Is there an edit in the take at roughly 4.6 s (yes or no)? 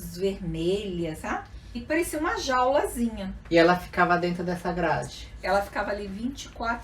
no